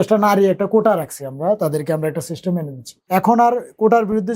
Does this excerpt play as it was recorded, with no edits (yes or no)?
no